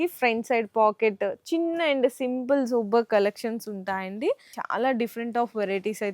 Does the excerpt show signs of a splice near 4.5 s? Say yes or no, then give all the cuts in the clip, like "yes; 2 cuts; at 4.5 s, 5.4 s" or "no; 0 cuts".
yes; 1 cut; at 4.5 s